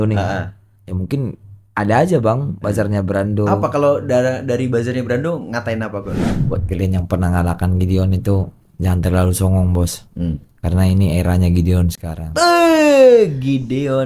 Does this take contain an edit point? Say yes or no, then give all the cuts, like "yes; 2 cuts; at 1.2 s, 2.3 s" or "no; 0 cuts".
yes; 1 cut; at 6.3 s